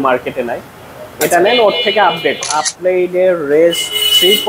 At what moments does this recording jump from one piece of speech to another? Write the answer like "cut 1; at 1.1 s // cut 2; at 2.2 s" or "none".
cut 1; at 2.5 s